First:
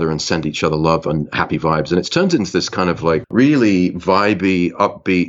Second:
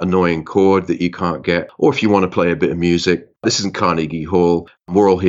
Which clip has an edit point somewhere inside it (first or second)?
second